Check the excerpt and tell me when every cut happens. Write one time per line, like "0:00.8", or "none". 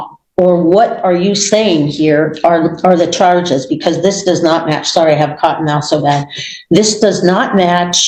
none